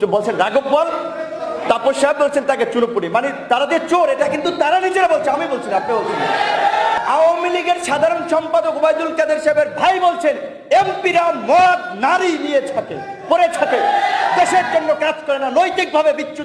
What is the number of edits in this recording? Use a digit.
1